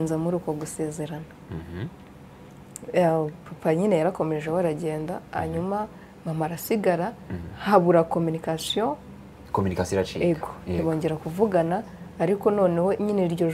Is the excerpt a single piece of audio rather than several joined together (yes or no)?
yes